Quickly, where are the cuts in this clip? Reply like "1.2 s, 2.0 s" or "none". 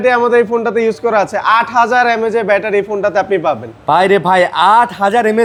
none